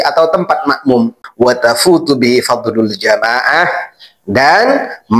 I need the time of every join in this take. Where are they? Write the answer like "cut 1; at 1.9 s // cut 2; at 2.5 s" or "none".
cut 1; at 1.2 s